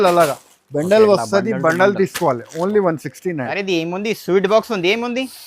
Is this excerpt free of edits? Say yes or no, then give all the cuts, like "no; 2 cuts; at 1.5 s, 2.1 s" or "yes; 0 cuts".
no; 1 cut; at 3.5 s